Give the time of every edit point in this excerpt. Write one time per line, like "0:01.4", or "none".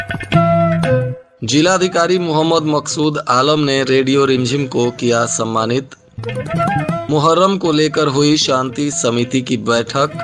0:01.2